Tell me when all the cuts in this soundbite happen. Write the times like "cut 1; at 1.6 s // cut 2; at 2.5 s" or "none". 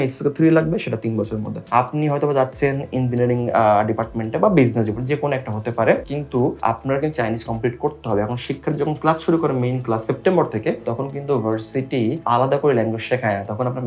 cut 1; at 1.6 s // cut 2; at 6.3 s // cut 3; at 12.2 s